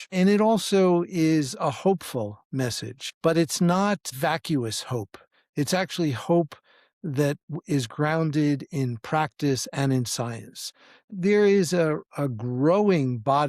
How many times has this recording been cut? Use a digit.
3